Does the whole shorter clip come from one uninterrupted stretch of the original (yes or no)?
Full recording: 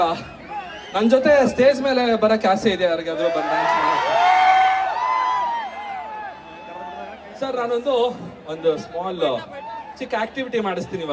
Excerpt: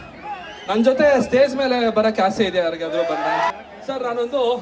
no